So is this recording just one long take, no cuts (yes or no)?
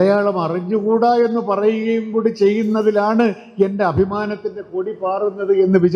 yes